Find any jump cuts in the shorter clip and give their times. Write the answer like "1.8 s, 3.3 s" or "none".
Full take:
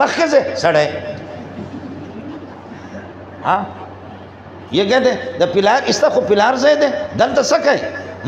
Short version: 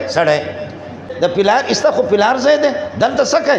1.1 s